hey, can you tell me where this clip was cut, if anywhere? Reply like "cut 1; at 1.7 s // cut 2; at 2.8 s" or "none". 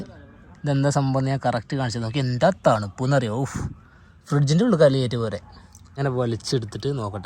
cut 1; at 5.9 s